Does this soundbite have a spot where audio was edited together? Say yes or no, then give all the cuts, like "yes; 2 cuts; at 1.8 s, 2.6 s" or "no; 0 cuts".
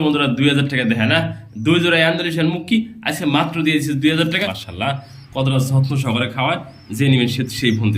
yes; 1 cut; at 4.6 s